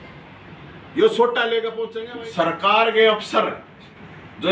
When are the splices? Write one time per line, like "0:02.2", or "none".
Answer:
0:01.8

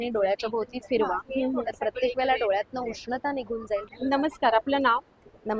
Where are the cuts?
0:03.9

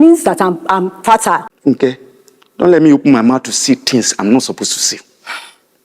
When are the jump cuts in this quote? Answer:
0:01.5

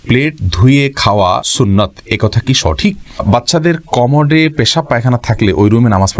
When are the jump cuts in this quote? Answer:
0:01.5
0:03.2

